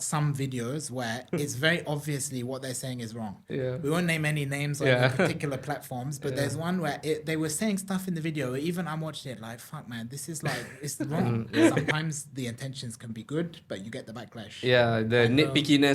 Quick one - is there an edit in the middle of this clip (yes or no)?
yes